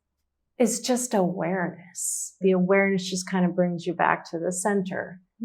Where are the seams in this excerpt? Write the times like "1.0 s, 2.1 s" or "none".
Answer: 2.4 s